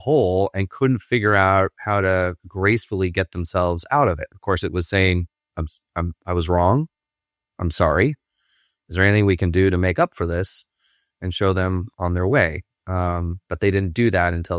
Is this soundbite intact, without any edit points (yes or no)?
yes